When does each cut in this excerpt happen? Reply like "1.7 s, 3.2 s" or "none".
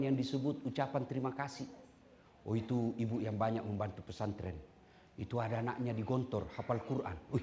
none